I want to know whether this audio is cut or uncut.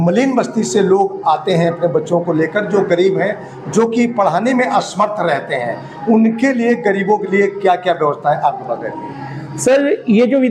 uncut